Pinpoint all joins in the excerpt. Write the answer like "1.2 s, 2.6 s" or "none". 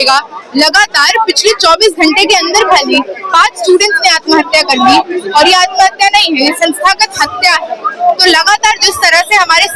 none